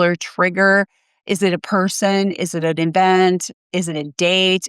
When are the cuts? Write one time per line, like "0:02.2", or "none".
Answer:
none